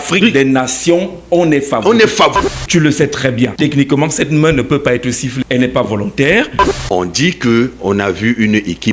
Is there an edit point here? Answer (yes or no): yes